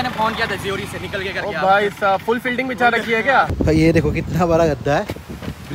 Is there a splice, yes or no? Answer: yes